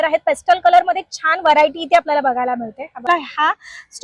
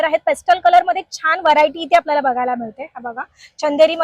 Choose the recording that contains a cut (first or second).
first